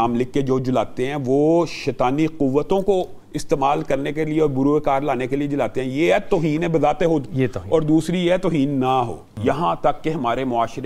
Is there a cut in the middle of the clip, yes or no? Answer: yes